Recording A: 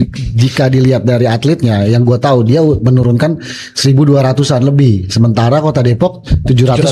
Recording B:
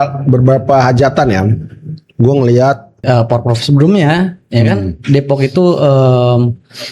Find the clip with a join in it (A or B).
B